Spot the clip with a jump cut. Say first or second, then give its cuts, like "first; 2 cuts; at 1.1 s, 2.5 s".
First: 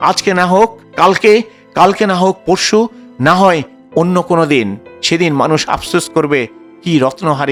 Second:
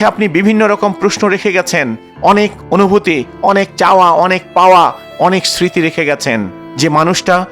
second; 1 cut; at 6.6 s